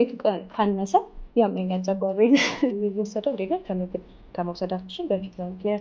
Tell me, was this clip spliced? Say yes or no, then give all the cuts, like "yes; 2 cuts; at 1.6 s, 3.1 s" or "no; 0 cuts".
yes; 1 cut; at 2.7 s